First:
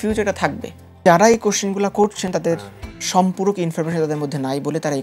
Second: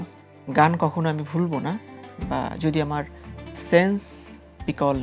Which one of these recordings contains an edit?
first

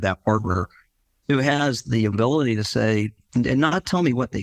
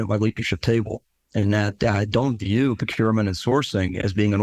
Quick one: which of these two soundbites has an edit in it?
first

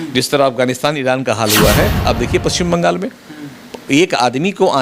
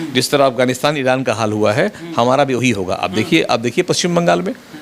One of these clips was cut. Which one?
first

